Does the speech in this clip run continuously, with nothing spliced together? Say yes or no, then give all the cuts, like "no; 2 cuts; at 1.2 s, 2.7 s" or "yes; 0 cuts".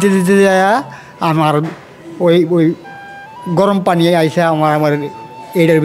yes; 0 cuts